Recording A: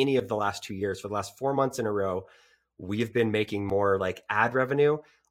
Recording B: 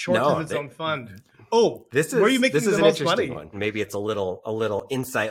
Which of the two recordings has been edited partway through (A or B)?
B